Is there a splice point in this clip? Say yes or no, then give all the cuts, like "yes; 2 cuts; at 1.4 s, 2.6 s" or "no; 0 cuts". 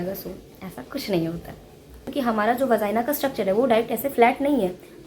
yes; 1 cut; at 2.0 s